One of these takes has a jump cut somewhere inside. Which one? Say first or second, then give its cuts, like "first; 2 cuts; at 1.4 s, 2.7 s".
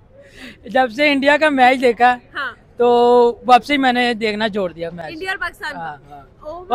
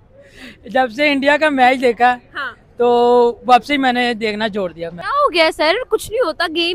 second; 1 cut; at 4.9 s